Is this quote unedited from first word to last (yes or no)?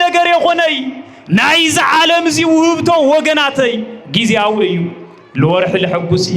yes